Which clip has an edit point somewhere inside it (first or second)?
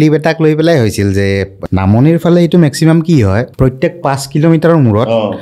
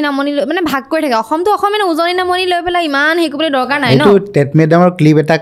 first